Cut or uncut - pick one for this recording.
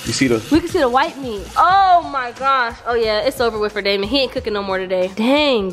uncut